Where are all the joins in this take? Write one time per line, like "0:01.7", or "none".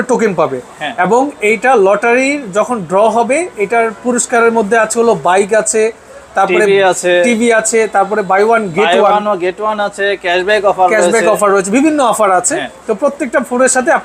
none